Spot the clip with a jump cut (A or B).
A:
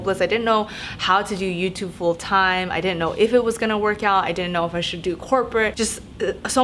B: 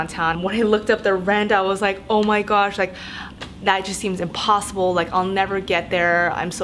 A